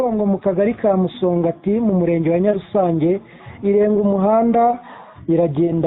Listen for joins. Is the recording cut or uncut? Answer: uncut